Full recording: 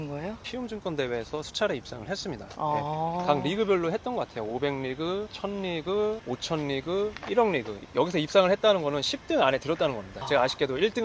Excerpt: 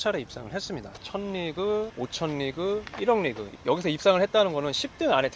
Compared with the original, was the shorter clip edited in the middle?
yes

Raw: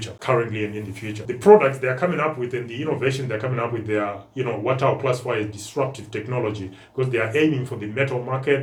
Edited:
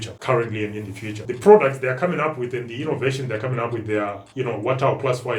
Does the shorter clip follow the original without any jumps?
yes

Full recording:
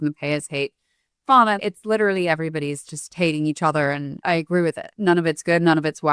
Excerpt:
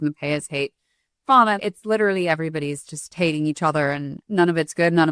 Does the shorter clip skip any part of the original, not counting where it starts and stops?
yes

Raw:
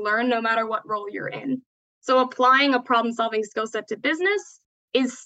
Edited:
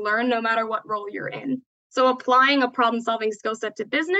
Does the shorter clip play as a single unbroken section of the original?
no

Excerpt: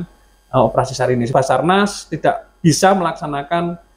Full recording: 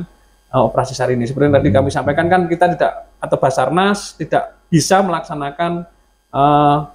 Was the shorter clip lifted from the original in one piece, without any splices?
no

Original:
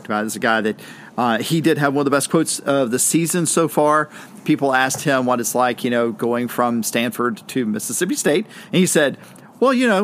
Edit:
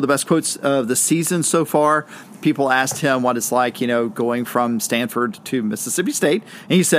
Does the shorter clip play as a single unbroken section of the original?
yes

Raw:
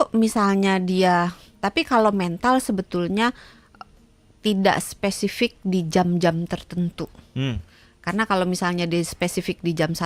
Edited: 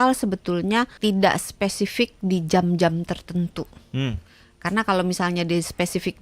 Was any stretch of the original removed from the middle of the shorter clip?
yes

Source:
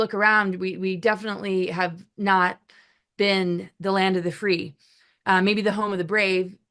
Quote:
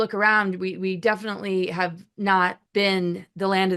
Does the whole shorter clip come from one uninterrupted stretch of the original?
no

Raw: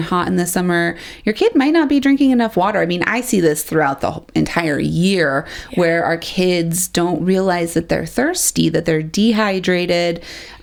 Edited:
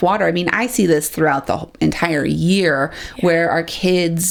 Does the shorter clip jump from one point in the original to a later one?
no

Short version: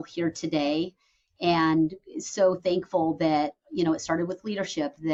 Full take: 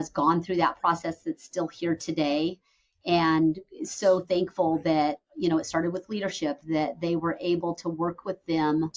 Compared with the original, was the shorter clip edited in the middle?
no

